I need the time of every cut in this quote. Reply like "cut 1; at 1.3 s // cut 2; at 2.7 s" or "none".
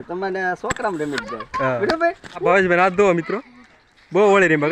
cut 1; at 2.4 s